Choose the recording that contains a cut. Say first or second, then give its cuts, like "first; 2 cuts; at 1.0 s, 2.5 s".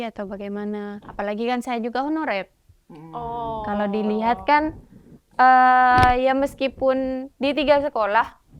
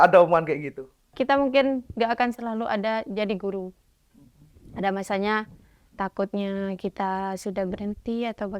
second; 1 cut; at 1.1 s